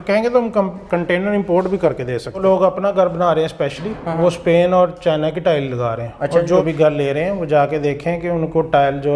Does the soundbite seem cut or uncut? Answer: cut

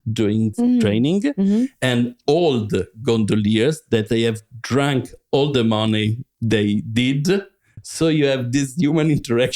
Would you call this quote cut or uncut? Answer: cut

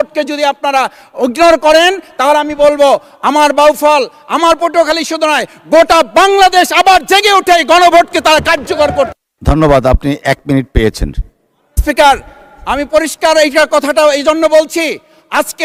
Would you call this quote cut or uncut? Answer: uncut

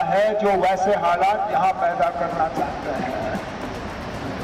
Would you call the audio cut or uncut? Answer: uncut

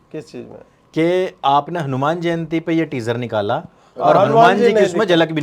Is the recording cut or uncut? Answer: uncut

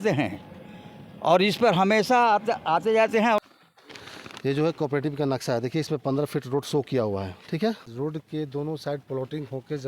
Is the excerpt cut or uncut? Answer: cut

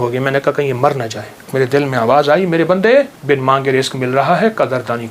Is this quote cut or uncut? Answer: cut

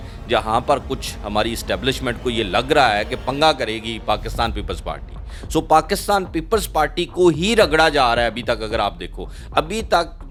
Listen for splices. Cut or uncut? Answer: uncut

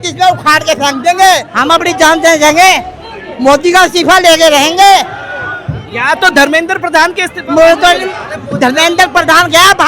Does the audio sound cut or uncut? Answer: cut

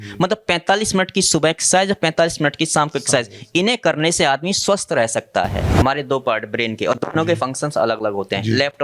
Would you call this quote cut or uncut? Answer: cut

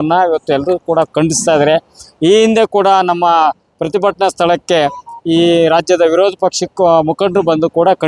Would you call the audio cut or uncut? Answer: uncut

